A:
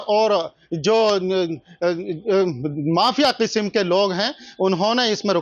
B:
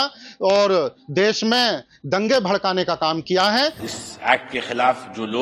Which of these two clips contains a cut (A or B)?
B